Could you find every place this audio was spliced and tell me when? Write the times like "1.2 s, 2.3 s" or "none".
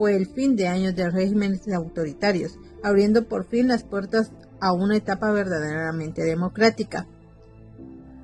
7.2 s